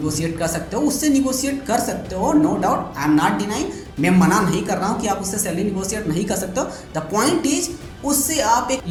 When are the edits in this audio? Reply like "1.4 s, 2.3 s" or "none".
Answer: none

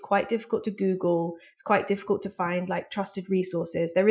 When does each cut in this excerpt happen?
none

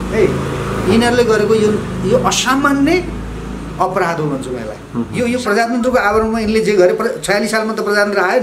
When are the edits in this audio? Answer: 5.1 s

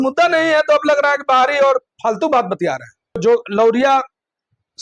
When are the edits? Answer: 3.2 s

